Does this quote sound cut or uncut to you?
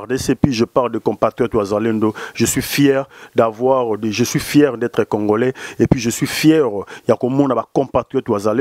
uncut